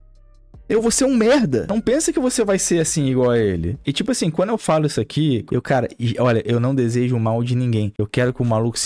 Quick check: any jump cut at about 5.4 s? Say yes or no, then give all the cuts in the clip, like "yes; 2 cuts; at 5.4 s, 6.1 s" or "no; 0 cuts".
yes; 4 cuts; at 1.7 s, 3.8 s, 5.4 s, 8.0 s